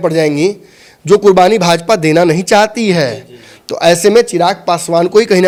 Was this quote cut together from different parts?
no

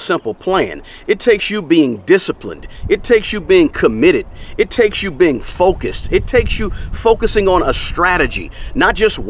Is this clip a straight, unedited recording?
yes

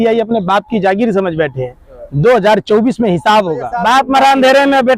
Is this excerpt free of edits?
no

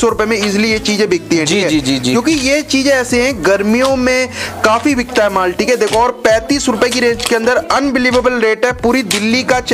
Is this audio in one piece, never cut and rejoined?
yes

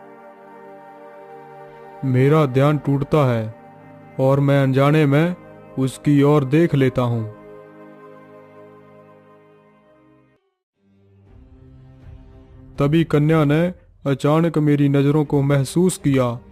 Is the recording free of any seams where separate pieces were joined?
no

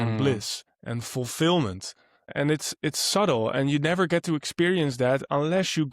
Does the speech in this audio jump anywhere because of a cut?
yes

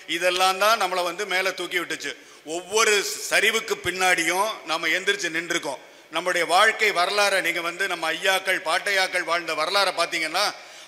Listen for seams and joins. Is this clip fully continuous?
yes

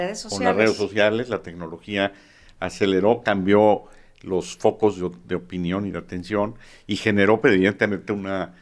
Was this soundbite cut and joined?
no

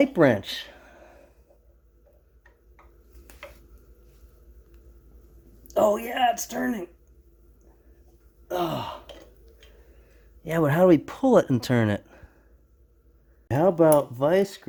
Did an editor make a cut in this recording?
no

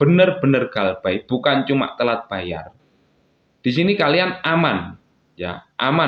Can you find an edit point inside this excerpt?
no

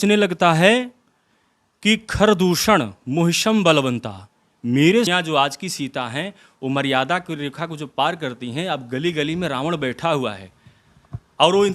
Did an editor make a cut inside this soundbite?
yes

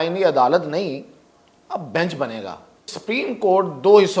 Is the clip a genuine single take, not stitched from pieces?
no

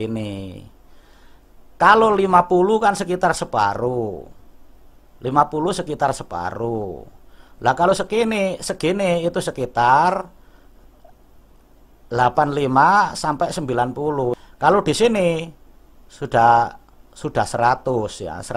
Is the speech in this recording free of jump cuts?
yes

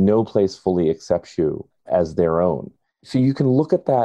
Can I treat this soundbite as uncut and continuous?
no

